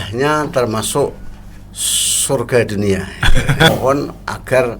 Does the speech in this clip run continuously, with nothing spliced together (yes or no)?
no